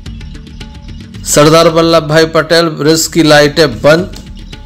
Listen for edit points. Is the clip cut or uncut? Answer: cut